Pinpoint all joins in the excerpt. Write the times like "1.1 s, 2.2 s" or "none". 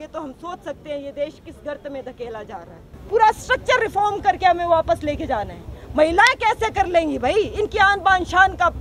2.9 s